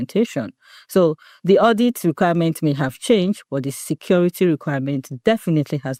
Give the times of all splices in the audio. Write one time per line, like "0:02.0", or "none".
none